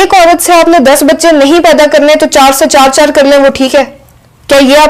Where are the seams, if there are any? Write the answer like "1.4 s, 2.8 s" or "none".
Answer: none